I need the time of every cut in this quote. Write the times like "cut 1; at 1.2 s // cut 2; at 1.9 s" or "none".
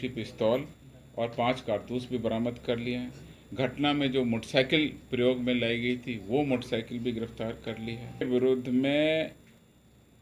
cut 1; at 8.2 s

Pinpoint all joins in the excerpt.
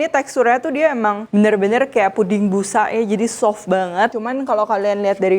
cut 1; at 1.2 s // cut 2; at 4.1 s

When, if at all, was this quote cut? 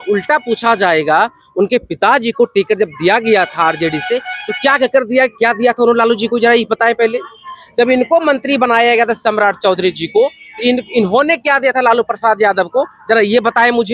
none

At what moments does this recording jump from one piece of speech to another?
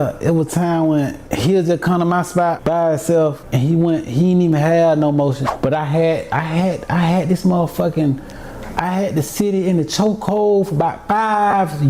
cut 1; at 1.2 s // cut 2; at 2.6 s // cut 3; at 3.4 s // cut 4; at 5.5 s

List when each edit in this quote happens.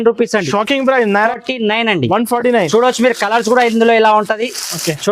cut 1; at 1.3 s

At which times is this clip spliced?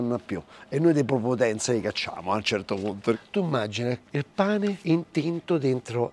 cut 1; at 3.2 s // cut 2; at 4.8 s

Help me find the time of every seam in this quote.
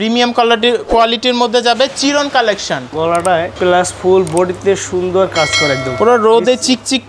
cut 1; at 3.0 s

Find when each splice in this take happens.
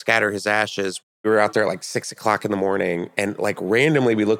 cut 1; at 1.2 s

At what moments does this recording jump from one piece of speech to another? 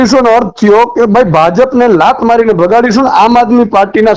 none

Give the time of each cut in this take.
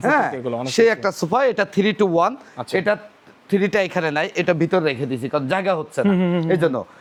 none

